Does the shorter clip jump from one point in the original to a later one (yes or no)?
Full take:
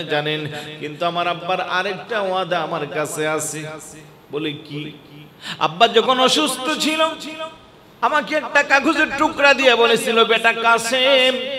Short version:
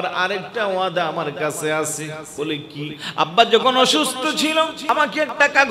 yes